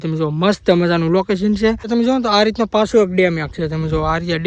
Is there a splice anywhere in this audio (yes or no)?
yes